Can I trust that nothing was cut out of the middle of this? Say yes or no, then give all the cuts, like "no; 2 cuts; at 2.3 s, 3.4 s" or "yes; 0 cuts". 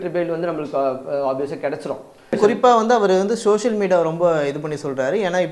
no; 1 cut; at 2.4 s